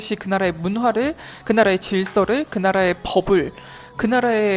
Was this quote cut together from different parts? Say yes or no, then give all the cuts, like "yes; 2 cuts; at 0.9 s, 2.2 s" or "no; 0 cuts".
no; 0 cuts